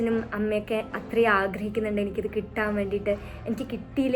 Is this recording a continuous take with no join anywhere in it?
yes; 0 cuts

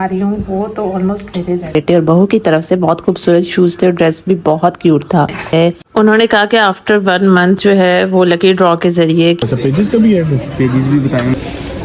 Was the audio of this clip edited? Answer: yes; 3 cuts; at 1.7 s, 5.5 s, 9.4 s

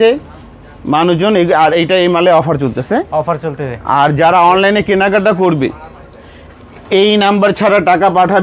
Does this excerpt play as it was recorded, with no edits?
yes; 0 cuts

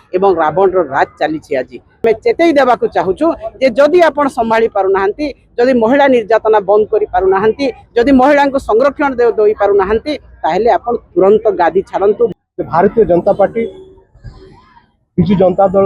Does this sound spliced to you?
yes; 2 cuts; at 2.0 s, 12.3 s

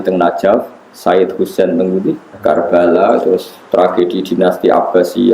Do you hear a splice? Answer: yes; 1 cut; at 2.3 s

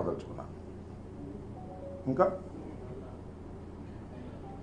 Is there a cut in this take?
no; 0 cuts

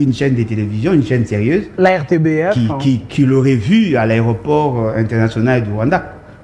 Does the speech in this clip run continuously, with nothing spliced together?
yes; 0 cuts

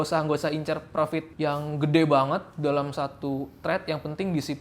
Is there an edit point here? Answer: yes; 1 cut; at 1.3 s

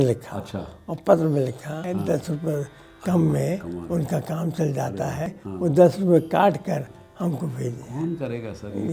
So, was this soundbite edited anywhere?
yes; 2 cuts; at 1.8 s, 5.4 s

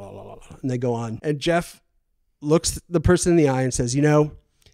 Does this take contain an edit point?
yes; 1 cut; at 1.2 s

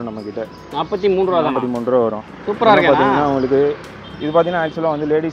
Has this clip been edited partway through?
no; 0 cuts

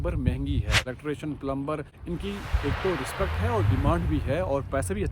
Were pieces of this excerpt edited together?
yes; 2 cuts; at 0.8 s, 1.9 s

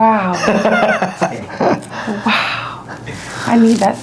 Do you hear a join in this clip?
no; 0 cuts

